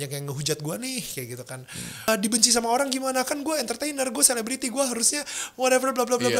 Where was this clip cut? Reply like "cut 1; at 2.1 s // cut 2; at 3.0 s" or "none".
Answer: cut 1; at 2.1 s